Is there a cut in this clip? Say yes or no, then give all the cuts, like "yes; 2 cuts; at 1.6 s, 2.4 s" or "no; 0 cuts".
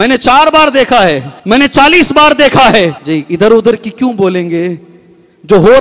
yes; 2 cuts; at 1.3 s, 3.0 s